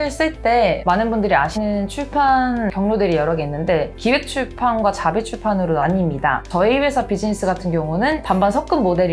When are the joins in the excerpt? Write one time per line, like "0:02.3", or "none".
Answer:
0:01.5
0:02.7
0:06.4
0:08.2

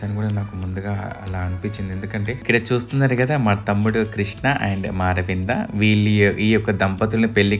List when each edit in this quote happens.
0:02.4

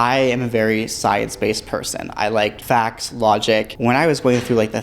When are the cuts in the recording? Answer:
0:02.6
0:03.7

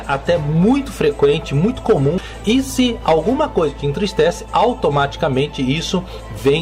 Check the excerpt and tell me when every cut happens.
0:02.2

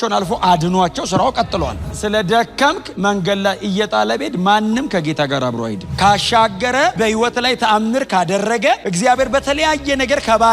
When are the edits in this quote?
0:01.8
0:05.8

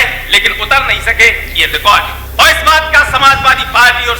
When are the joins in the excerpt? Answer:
0:02.2

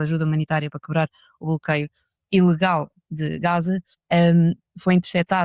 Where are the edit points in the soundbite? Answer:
0:03.9

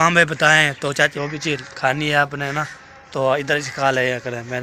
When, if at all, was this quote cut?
0:01.1

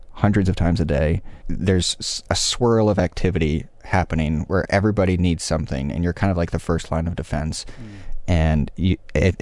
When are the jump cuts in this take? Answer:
0:01.5

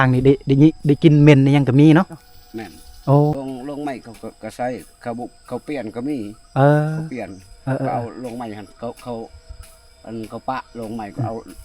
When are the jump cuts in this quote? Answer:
0:02.4
0:03.3

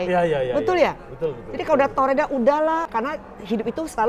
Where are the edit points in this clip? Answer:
none

